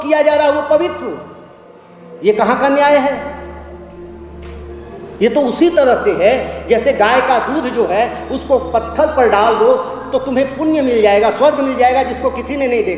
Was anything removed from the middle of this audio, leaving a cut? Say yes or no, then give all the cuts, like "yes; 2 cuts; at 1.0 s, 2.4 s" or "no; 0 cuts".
no; 0 cuts